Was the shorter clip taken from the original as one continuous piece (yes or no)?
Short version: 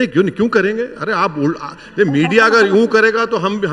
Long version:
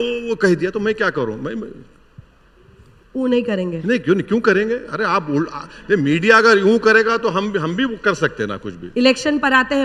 yes